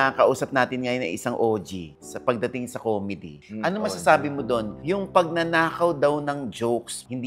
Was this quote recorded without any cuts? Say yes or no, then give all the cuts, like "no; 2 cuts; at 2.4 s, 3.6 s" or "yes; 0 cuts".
yes; 0 cuts